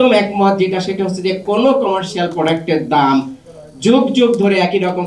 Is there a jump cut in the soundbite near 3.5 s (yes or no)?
no